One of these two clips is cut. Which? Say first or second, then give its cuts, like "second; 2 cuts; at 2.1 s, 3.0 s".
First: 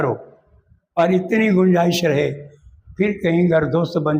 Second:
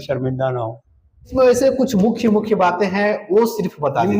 second; 1 cut; at 1.3 s